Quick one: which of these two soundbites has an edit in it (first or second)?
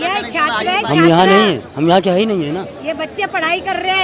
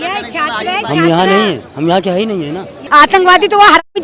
second